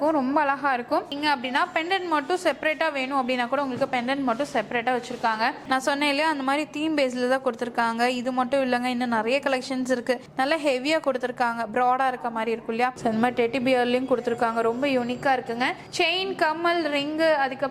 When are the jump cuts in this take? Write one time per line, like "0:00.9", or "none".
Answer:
0:01.0
0:05.6
0:10.2
0:13.0